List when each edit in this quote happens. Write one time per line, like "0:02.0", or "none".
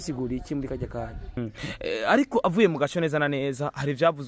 0:01.4